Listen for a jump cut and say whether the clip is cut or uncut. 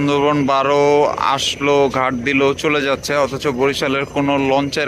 uncut